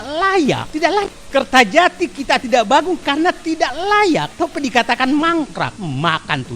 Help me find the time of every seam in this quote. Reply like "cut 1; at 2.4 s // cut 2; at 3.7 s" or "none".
cut 1; at 1.0 s // cut 2; at 4.3 s // cut 3; at 5.8 s

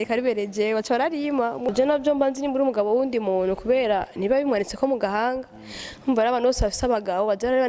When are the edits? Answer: cut 1; at 1.7 s

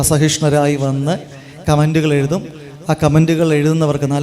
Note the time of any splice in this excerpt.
cut 1; at 3.2 s

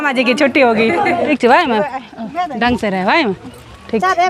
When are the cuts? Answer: cut 1; at 1.3 s

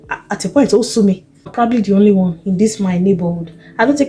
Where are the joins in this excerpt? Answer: cut 1; at 1.4 s

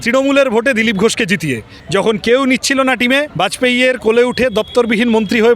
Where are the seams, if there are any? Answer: cut 1; at 1.7 s // cut 2; at 3.3 s

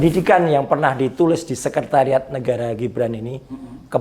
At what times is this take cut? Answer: none

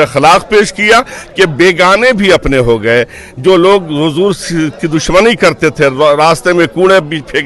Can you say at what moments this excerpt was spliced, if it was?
none

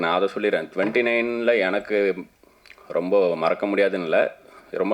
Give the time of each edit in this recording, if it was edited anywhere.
none

